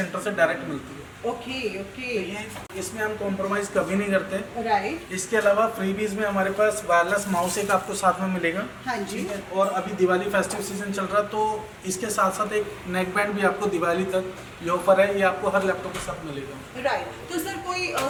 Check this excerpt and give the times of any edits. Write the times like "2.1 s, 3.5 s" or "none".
none